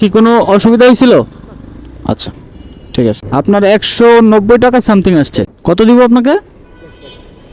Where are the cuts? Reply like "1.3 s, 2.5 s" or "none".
3.2 s, 5.5 s

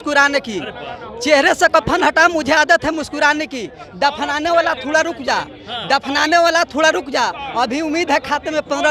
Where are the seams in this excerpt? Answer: none

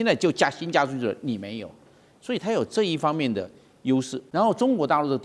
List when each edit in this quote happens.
4.2 s

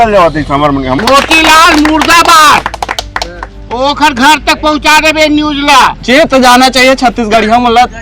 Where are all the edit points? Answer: 1.0 s, 6.0 s

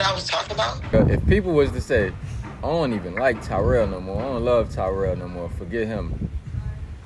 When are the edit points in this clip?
0.9 s

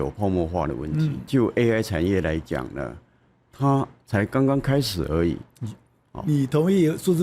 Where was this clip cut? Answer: 1.3 s

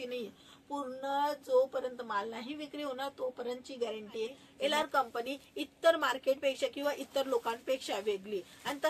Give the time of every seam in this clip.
4.4 s

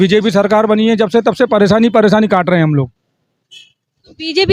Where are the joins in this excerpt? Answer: none

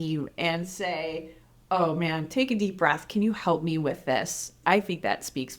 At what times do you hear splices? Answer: 4.6 s

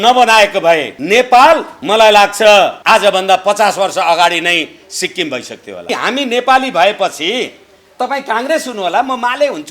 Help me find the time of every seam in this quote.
0.9 s, 1.7 s, 2.8 s, 5.9 s

